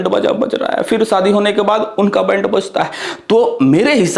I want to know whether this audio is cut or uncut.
uncut